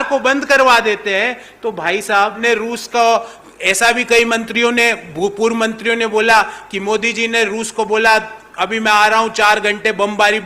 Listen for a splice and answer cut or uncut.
cut